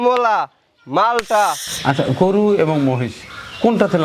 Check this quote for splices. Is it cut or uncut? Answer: cut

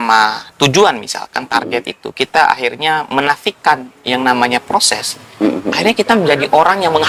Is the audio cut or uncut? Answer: uncut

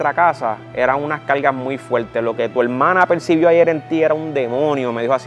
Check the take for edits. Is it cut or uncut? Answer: uncut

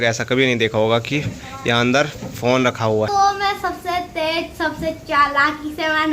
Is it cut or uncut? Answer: cut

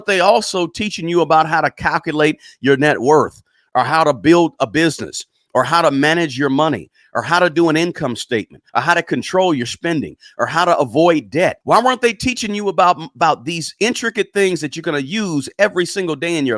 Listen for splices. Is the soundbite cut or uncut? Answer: cut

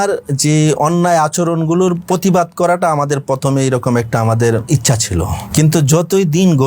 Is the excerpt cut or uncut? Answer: cut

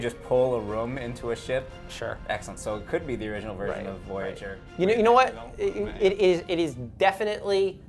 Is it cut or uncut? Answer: uncut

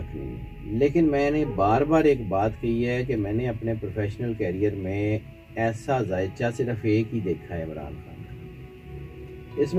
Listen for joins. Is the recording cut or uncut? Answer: uncut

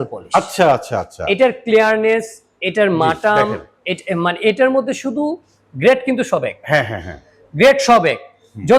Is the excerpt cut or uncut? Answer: uncut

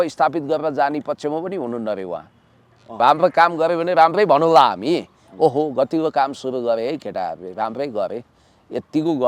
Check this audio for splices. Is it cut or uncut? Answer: cut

